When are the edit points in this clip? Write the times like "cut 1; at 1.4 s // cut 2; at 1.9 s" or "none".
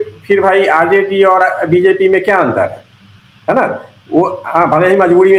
none